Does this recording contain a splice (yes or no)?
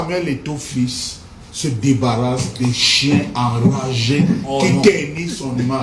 no